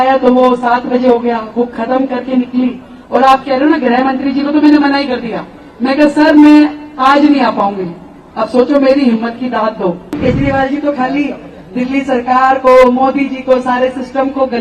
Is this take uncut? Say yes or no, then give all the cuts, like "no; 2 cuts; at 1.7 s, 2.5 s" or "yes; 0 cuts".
no; 1 cut; at 10.2 s